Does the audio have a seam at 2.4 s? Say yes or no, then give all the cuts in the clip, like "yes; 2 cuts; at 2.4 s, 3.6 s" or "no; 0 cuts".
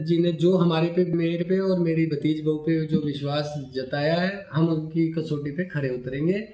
no; 1 cut; at 1.1 s